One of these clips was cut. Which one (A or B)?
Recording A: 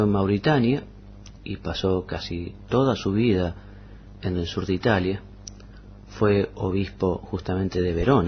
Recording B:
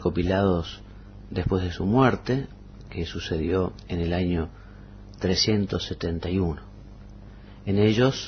A